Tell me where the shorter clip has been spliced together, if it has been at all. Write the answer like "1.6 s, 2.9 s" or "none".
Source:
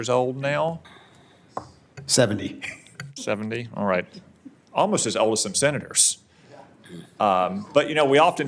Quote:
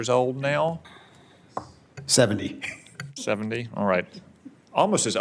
none